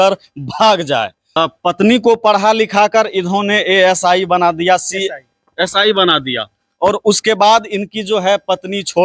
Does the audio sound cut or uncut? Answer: cut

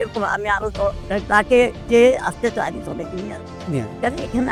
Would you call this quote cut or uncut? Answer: uncut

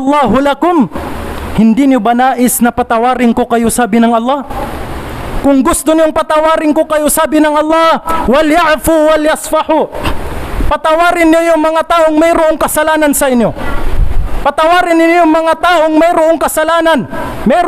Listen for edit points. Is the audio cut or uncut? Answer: uncut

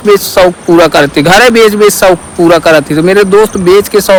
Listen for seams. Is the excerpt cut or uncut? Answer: uncut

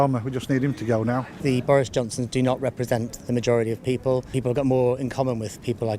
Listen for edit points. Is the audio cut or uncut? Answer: cut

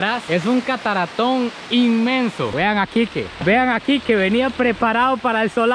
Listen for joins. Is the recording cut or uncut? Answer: cut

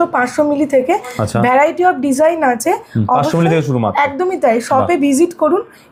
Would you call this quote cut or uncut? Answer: uncut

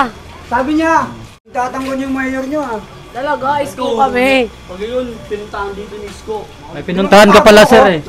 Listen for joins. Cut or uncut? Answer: cut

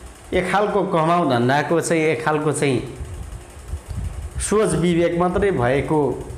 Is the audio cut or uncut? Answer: uncut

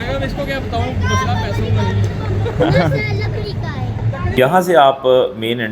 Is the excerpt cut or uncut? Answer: cut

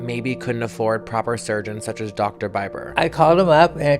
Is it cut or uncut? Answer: cut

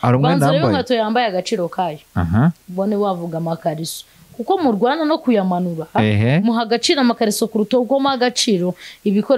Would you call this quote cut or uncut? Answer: uncut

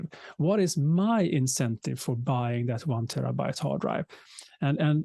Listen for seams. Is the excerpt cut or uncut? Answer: uncut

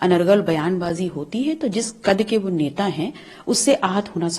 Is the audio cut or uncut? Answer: uncut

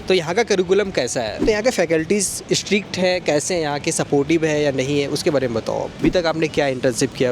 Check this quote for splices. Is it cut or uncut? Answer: cut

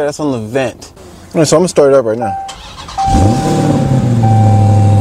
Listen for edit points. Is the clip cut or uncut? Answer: uncut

